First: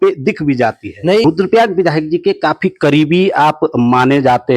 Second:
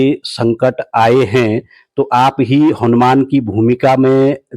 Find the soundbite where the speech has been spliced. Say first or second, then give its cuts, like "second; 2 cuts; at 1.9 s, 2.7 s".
first; 1 cut; at 1.2 s